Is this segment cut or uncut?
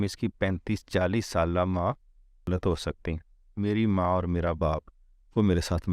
cut